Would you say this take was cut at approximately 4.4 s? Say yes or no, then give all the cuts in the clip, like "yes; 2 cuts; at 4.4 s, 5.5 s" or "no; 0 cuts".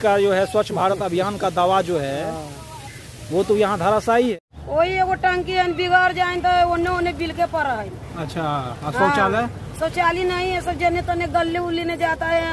yes; 1 cut; at 4.4 s